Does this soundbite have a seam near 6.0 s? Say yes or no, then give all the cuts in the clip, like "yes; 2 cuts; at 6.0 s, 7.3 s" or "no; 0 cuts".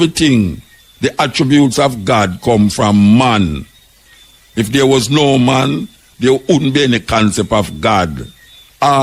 no; 0 cuts